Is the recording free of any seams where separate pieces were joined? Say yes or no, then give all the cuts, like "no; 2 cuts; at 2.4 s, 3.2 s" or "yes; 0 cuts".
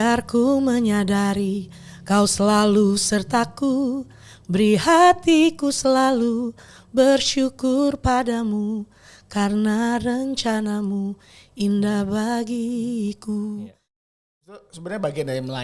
no; 1 cut; at 14.1 s